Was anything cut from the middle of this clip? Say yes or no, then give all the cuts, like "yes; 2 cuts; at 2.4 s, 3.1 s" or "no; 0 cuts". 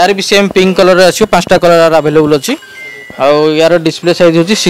no; 0 cuts